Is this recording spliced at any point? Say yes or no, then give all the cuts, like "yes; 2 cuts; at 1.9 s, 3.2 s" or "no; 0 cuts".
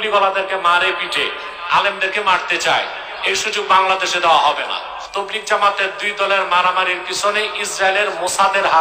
yes; 1 cut; at 5.0 s